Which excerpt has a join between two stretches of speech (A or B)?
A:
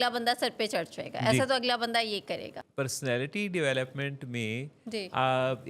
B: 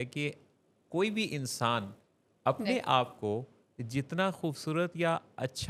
A